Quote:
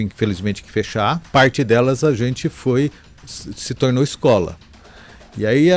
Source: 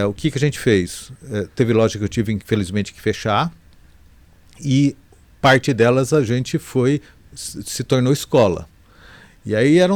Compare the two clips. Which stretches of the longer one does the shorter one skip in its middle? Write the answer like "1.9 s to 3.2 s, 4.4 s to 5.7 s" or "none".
3.5 s to 5.3 s

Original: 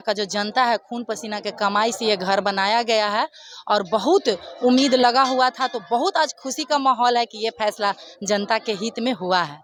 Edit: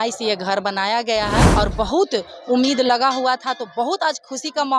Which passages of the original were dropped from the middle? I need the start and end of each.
3.3 s to 3.6 s

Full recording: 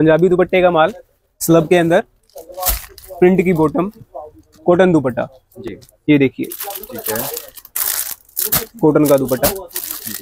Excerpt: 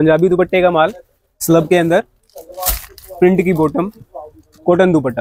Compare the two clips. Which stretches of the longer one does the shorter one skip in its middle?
none

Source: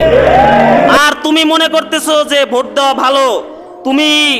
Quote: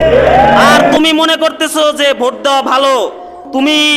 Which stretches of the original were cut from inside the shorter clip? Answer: 0.9 s to 1.3 s

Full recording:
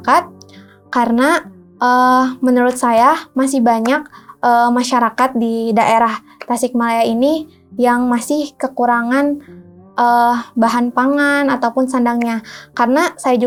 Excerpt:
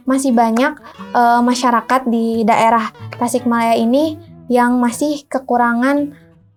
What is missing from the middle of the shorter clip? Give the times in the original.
none

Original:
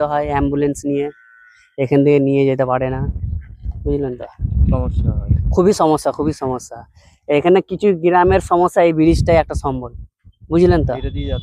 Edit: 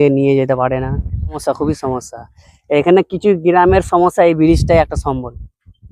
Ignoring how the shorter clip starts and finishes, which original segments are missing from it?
3.5 s to 6.0 s

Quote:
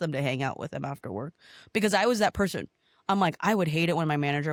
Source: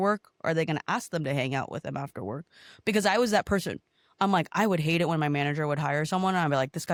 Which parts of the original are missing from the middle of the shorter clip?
none

